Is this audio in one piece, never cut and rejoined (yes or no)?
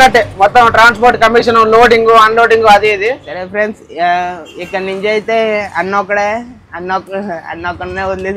no